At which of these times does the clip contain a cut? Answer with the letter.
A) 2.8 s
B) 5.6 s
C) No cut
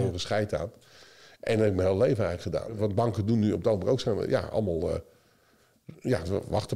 A